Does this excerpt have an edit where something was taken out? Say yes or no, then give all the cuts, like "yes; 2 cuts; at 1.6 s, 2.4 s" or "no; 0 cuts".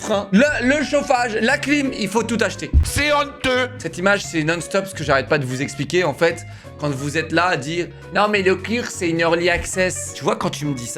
no; 0 cuts